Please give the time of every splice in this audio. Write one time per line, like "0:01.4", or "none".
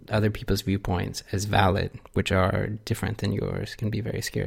none